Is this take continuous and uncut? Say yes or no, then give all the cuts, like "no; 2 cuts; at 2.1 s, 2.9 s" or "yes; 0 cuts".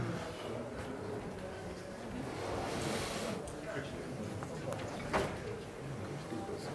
yes; 0 cuts